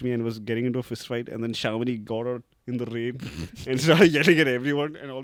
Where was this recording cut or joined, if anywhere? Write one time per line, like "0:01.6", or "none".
none